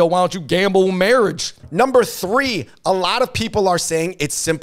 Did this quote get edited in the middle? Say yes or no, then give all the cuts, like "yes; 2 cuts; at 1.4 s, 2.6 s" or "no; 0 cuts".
no; 0 cuts